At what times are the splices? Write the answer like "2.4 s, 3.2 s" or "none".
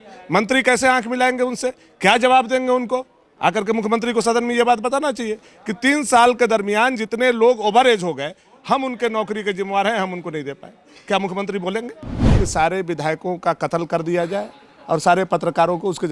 12.3 s